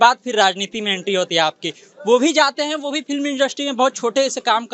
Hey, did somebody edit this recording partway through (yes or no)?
no